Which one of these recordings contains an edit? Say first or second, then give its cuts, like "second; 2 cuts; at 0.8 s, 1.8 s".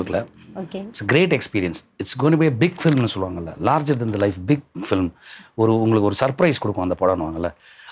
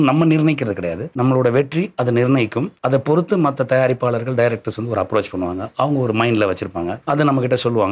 second; 3 cuts; at 1.0 s, 2.7 s, 7.0 s